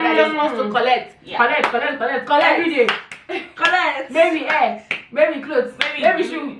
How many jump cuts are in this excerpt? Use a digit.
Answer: 0